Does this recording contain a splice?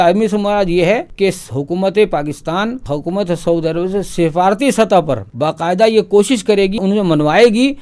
yes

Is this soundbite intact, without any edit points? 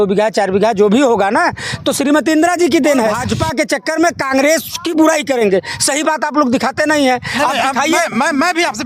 no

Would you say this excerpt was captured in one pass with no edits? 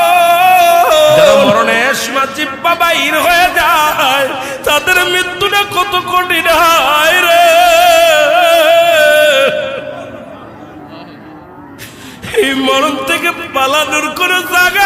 no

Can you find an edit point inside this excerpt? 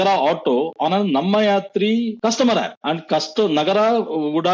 yes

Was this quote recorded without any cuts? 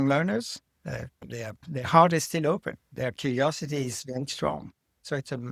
no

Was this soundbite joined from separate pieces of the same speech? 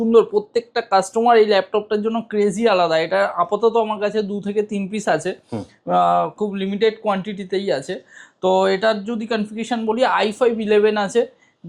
no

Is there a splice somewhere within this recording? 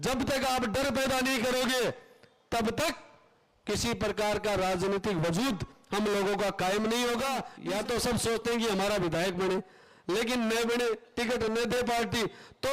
yes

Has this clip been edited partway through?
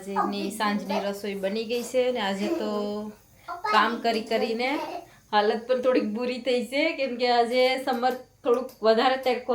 no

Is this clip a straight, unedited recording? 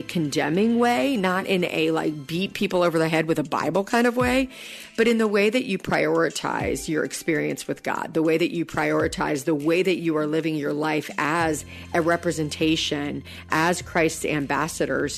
yes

